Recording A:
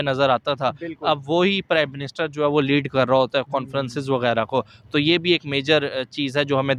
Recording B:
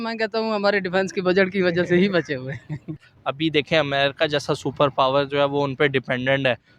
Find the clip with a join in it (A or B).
B